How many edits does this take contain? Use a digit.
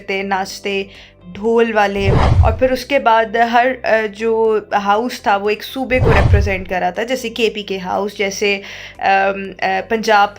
1